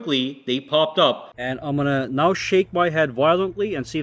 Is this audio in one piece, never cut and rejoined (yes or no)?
no